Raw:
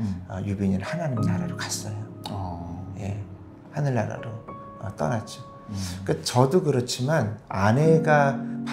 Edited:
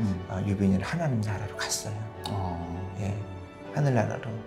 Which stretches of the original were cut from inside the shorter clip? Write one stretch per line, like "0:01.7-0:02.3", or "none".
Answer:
none